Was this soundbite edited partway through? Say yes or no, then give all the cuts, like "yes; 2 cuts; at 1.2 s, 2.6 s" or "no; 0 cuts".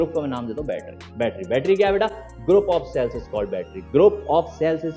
no; 0 cuts